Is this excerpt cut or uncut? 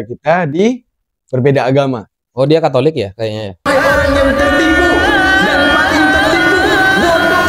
cut